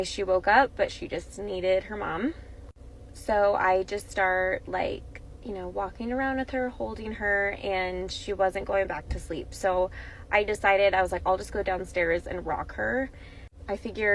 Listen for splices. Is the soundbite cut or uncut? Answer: uncut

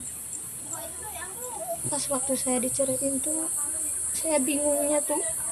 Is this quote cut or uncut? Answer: cut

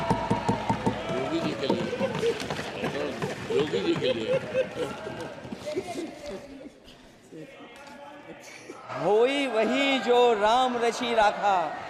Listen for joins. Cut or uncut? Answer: cut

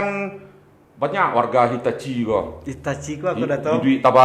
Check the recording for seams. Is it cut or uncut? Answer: uncut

